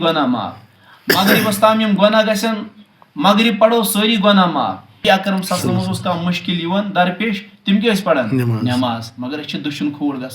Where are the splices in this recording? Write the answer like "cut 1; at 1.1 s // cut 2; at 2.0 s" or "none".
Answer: cut 1; at 5.0 s